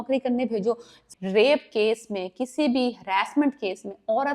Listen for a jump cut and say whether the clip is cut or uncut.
cut